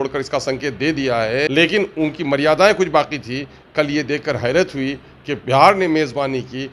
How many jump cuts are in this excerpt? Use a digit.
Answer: 1